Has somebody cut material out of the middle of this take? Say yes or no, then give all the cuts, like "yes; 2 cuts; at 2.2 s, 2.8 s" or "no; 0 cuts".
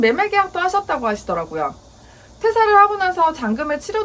no; 0 cuts